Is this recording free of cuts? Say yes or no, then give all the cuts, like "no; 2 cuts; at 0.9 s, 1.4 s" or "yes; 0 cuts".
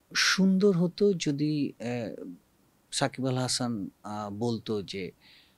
yes; 0 cuts